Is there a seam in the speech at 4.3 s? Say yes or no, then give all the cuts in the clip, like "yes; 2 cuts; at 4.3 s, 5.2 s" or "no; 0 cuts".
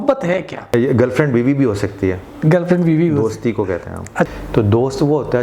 yes; 2 cuts; at 0.7 s, 4.3 s